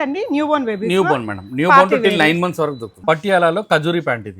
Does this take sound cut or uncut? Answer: cut